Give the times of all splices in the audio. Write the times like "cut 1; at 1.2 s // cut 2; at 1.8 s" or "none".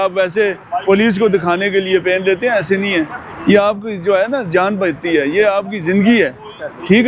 none